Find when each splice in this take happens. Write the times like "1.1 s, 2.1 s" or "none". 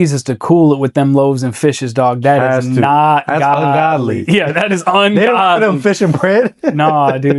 none